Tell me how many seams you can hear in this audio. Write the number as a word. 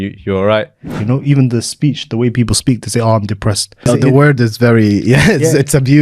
two